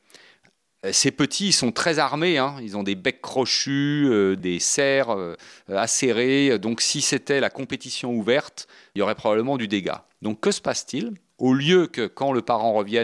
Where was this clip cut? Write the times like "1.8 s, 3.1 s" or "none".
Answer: none